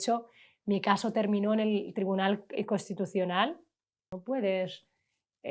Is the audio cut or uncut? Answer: cut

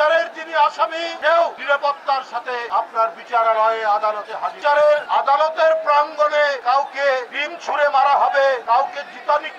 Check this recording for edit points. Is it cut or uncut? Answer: uncut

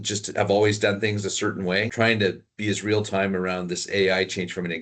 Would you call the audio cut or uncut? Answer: cut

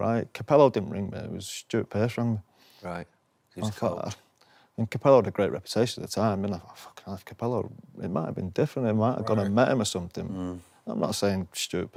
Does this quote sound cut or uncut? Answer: uncut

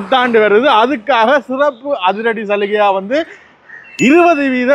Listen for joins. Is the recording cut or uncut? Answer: uncut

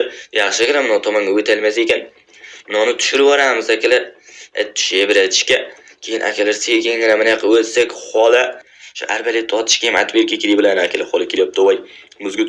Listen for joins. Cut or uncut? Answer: cut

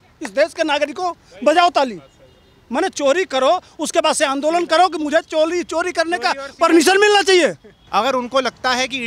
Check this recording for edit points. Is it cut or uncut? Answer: cut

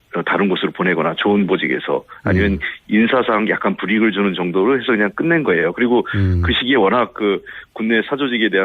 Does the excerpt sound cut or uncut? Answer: cut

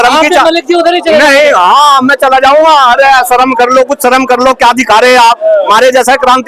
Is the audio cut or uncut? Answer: uncut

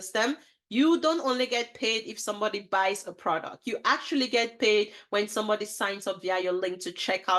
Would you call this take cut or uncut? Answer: uncut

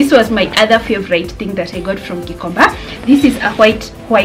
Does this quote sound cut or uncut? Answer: uncut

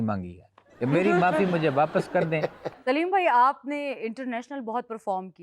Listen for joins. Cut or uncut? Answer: cut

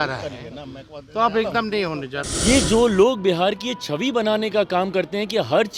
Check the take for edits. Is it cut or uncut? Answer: cut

